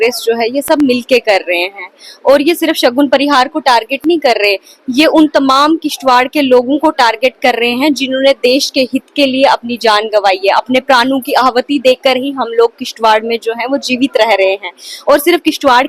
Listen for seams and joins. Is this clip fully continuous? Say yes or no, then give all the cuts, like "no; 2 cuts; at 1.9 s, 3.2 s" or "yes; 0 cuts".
yes; 0 cuts